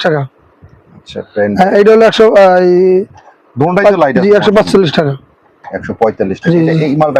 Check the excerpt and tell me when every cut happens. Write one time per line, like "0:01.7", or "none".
none